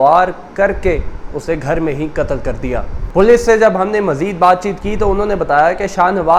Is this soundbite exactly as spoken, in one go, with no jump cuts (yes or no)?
yes